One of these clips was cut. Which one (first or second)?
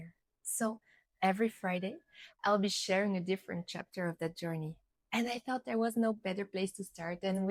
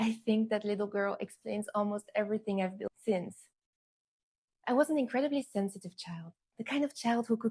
second